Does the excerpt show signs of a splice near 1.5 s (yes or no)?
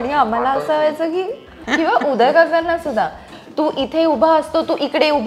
yes